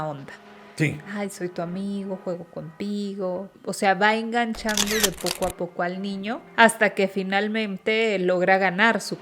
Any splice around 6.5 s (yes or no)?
yes